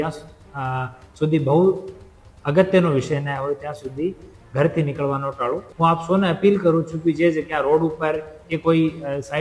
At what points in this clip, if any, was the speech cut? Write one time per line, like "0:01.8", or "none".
0:05.7